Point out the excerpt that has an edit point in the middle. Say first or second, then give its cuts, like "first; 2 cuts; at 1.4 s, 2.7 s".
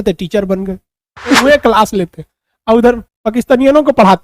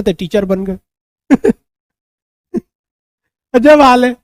first; 1 cut; at 1.4 s